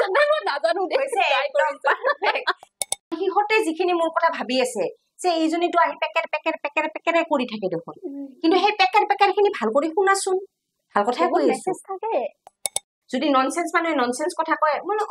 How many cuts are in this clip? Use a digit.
2